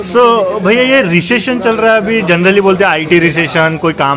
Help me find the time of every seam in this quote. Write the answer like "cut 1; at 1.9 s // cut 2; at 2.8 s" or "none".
none